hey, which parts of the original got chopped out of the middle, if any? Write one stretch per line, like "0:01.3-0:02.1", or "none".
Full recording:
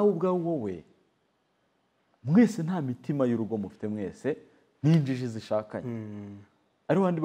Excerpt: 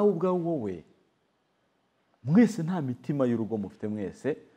none